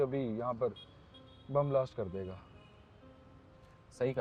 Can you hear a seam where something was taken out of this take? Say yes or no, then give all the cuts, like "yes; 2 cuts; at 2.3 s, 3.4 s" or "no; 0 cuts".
no; 0 cuts